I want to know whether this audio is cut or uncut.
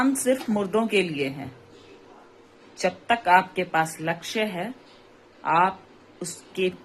uncut